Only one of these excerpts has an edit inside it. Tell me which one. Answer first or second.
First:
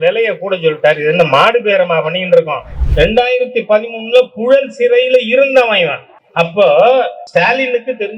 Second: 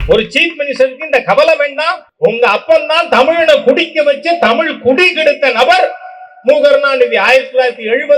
first